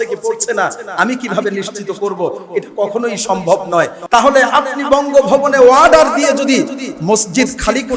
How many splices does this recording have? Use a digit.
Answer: 1